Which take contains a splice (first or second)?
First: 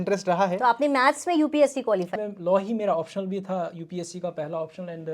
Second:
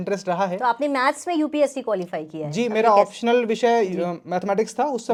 first